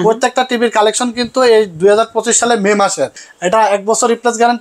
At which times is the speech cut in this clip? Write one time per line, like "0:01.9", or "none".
0:03.2

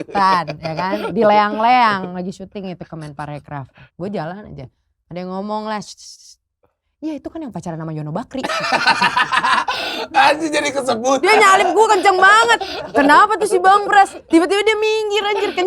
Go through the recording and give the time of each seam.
0:03.8
0:11.2
0:14.2

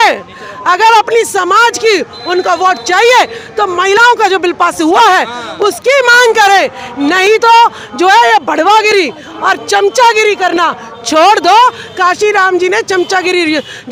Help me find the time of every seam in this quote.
none

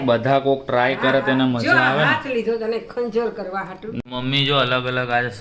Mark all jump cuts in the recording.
0:04.0

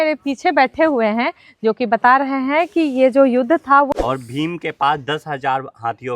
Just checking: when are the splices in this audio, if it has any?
0:03.9

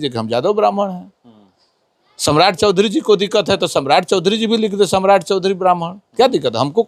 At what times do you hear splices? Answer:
none

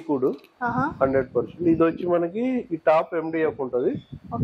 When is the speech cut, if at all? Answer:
none

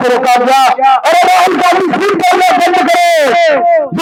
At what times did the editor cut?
none

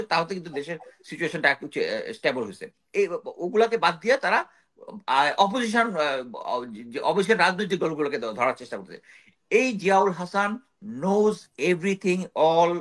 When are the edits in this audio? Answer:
0:02.8

